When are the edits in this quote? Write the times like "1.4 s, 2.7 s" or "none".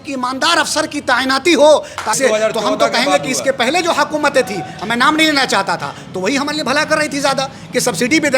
2.2 s